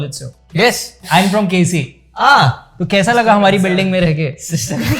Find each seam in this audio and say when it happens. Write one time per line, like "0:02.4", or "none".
0:01.0